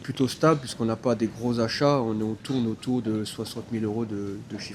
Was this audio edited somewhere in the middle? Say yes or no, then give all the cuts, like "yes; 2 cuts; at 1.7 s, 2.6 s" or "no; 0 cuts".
no; 0 cuts